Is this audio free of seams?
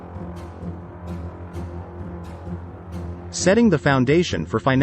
no; 1 cut; at 3.3 s

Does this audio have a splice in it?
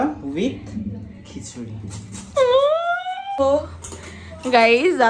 yes; 1 cut; at 3.4 s

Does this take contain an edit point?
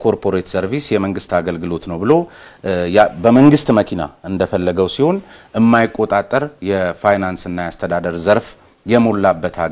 no; 0 cuts

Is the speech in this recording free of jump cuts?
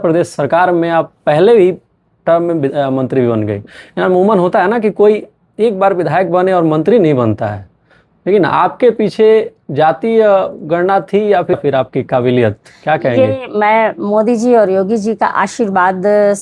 yes; 0 cuts

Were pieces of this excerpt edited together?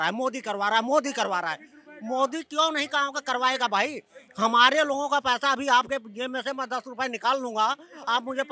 no; 0 cuts

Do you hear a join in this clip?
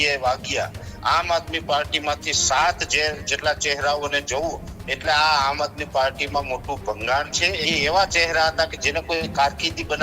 yes; 2 cuts; at 0.9 s, 7.6 s

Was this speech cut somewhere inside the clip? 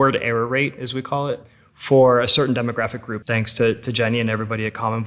yes; 1 cut; at 3.1 s

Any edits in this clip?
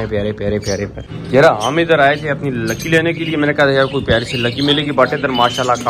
yes; 1 cut; at 1.2 s

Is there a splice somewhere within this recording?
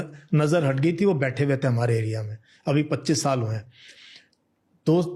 no; 0 cuts

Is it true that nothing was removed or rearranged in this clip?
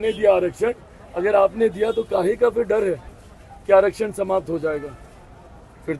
yes; 0 cuts

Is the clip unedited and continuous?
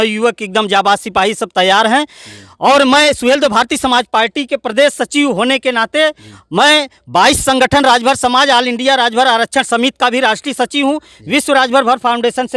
yes; 0 cuts

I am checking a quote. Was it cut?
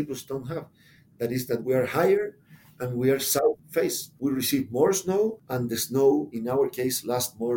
yes; 2 cuts; at 1.6 s, 6.3 s

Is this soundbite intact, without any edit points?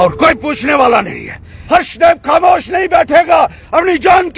no; 1 cut; at 1.5 s

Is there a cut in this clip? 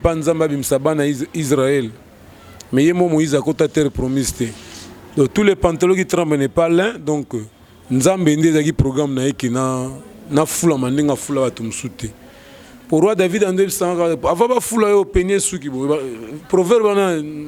no; 0 cuts

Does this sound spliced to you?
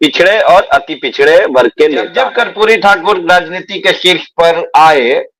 yes; 1 cut; at 2.2 s

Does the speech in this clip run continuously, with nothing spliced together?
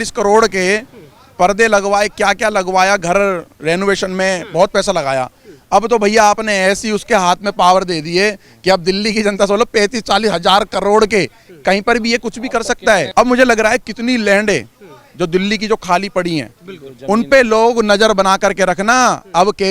yes; 0 cuts

